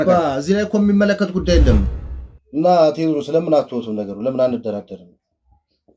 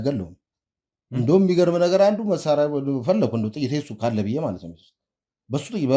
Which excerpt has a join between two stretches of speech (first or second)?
first